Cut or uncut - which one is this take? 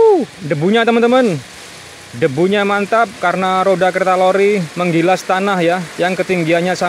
uncut